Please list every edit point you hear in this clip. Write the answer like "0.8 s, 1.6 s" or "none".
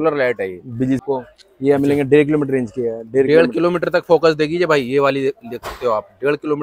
1.0 s